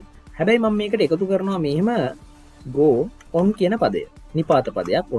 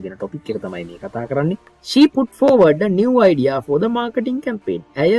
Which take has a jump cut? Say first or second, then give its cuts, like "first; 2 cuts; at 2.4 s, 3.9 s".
second; 1 cut; at 1.7 s